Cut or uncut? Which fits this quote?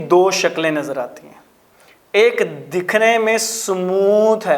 uncut